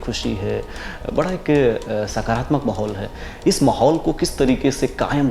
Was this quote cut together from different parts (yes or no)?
no